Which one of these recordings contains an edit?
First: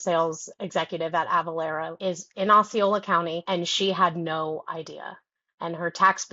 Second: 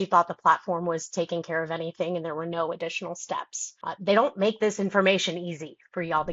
first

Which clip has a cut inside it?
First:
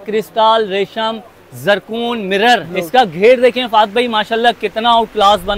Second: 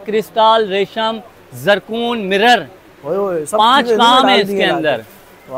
first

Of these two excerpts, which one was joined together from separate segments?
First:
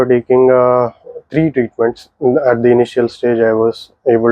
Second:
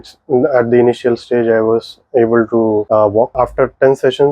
second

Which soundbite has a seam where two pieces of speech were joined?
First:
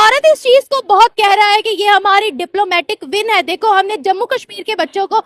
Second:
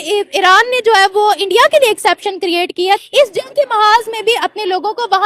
second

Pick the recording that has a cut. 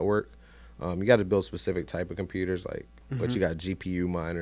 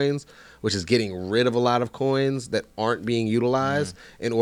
first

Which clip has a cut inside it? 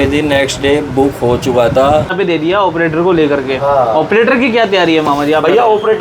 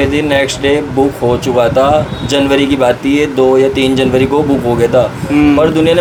first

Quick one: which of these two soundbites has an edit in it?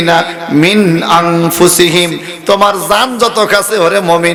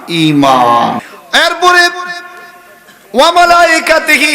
second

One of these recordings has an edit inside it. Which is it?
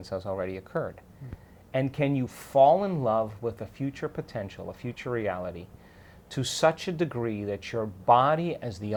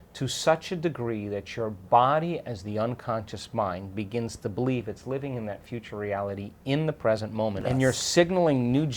second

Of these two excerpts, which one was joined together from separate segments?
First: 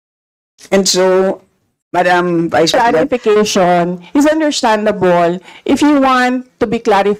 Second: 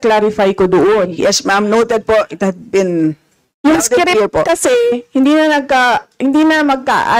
first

